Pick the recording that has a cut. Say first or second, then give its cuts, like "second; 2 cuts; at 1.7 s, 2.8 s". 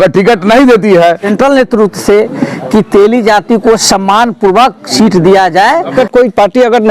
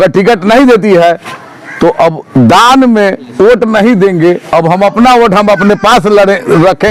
first; 2 cuts; at 1.3 s, 5.9 s